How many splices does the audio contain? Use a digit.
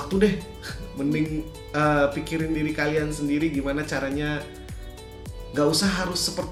0